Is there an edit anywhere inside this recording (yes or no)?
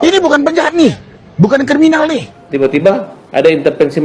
yes